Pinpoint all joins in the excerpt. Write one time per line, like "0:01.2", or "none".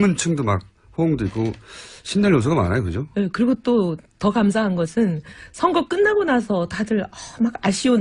0:06.5